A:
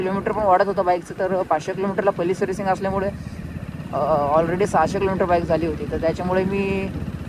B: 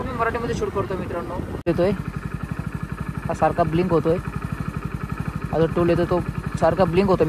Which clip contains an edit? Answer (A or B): B